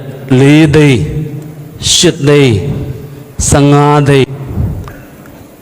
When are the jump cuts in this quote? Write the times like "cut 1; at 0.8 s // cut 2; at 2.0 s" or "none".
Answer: cut 1; at 4.2 s